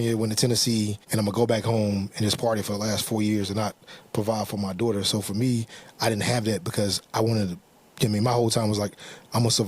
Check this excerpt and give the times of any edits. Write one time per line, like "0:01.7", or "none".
0:01.0